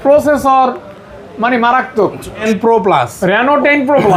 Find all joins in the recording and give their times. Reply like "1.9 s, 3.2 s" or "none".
2.4 s